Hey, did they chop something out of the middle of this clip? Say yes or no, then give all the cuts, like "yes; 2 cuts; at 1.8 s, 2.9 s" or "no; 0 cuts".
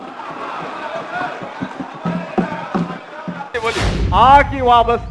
yes; 1 cut; at 3.5 s